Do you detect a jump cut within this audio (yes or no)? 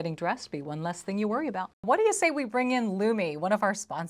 yes